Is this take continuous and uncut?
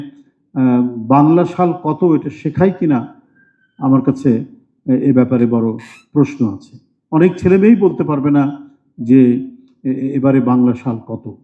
yes; 0 cuts

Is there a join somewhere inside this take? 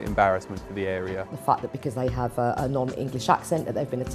yes; 1 cut; at 1.3 s

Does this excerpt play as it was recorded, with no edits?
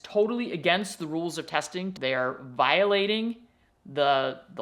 no; 1 cut; at 2.0 s

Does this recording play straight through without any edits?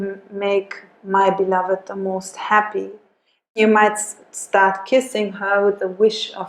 no; 1 cut; at 3.6 s

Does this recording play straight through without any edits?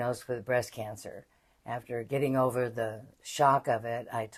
yes; 0 cuts

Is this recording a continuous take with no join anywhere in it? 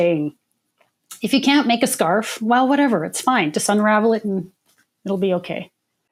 yes; 0 cuts

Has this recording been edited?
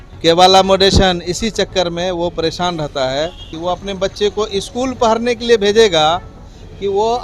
yes; 1 cut; at 3.5 s

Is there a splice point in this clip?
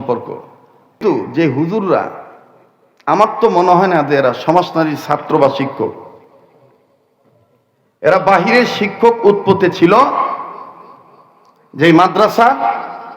yes; 1 cut; at 1.3 s

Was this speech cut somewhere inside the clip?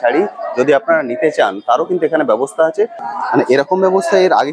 yes; 1 cut; at 3.0 s

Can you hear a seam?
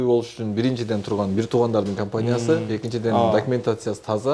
no; 0 cuts

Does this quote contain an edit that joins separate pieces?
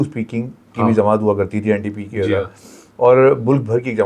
no; 0 cuts

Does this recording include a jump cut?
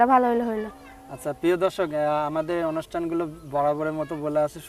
no; 0 cuts

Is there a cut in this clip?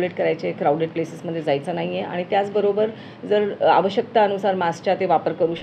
no; 0 cuts

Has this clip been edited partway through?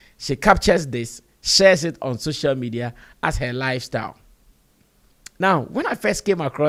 no; 0 cuts

